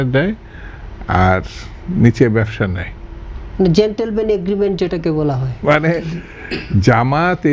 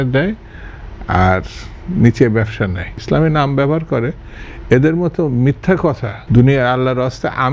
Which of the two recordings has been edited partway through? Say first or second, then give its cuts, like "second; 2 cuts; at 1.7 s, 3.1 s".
second; 2 cuts; at 2.9 s, 6.1 s